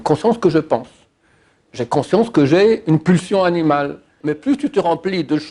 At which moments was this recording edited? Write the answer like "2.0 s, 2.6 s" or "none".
4.1 s